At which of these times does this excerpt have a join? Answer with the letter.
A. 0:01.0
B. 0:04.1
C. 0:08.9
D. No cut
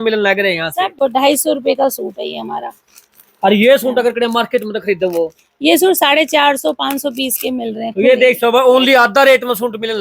A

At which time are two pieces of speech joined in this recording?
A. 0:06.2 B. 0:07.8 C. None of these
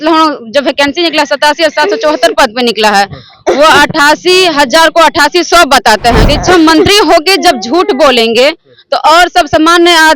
A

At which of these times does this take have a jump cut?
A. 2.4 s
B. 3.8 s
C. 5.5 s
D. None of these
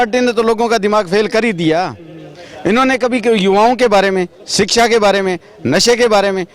D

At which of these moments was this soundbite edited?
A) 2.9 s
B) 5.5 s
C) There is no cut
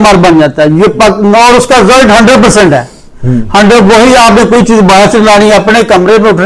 C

